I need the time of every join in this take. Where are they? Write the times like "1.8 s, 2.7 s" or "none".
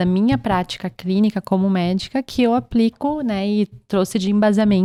none